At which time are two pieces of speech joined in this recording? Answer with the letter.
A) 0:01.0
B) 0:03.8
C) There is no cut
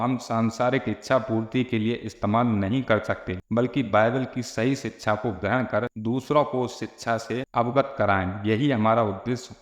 C